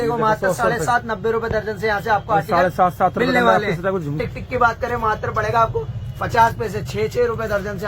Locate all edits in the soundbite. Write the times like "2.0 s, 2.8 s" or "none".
4.2 s